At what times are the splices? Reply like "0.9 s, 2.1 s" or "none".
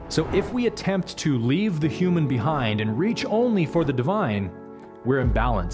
none